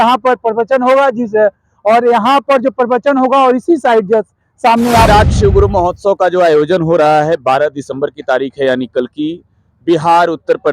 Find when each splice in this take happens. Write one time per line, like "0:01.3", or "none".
0:05.1